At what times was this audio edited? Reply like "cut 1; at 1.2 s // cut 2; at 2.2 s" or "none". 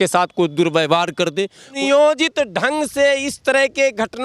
cut 1; at 1.6 s